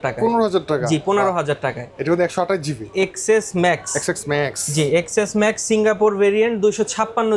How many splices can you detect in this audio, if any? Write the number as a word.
one